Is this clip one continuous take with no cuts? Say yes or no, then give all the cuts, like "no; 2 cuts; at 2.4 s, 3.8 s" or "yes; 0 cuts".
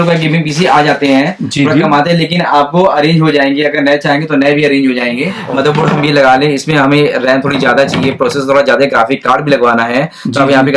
no; 1 cut; at 5.3 s